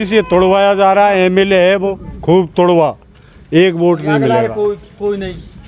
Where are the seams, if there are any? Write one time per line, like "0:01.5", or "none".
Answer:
none